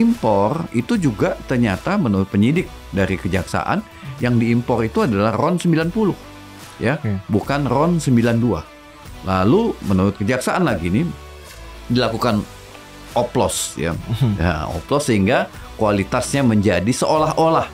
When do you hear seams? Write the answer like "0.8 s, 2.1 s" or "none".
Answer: none